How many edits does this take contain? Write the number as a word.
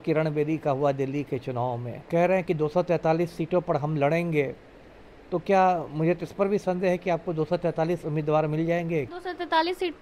two